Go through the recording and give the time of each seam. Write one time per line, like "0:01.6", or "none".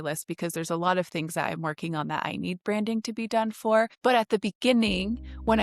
0:03.9